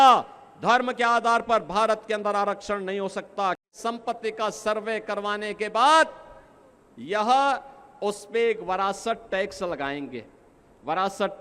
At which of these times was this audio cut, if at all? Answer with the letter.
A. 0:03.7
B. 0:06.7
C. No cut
A